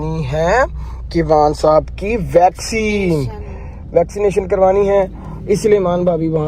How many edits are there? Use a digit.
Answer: 0